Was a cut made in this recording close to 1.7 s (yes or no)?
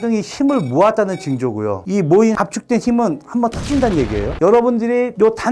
no